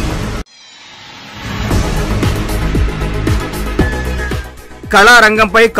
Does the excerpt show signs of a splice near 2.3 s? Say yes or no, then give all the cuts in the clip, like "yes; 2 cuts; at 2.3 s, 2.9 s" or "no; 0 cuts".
yes; 2 cuts; at 2.3 s, 4.1 s